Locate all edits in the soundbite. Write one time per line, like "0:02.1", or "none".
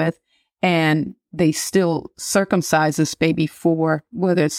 none